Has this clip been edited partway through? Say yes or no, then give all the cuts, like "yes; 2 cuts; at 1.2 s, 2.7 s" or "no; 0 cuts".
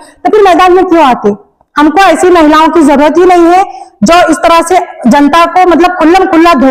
no; 0 cuts